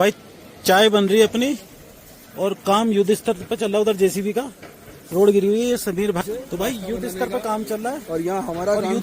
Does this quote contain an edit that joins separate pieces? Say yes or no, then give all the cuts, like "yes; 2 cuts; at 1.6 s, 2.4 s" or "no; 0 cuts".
yes; 1 cut; at 6.2 s